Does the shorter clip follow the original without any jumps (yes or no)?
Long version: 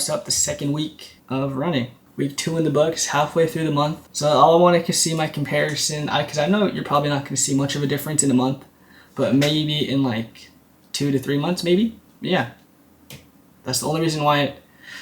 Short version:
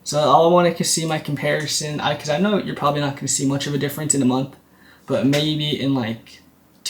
yes